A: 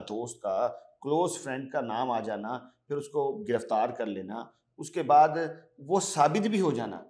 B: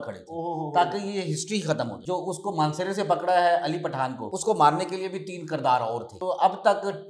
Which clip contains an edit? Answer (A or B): B